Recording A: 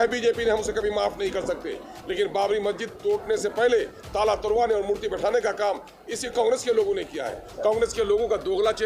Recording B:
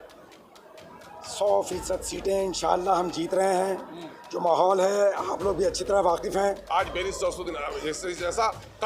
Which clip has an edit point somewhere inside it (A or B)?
B